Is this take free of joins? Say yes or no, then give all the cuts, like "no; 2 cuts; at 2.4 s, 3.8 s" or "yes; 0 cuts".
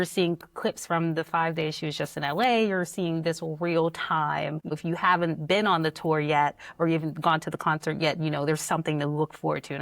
no; 1 cut; at 4.7 s